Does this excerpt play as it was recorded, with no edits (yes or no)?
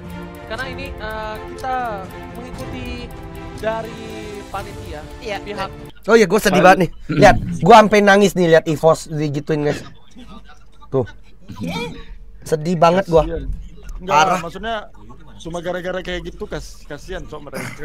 no